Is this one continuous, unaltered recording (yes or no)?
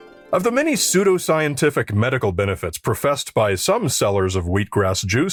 yes